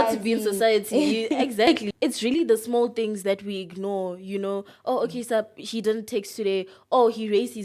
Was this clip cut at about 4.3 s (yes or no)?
no